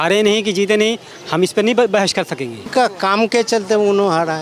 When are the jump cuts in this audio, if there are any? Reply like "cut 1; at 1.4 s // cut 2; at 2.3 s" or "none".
cut 1; at 2.7 s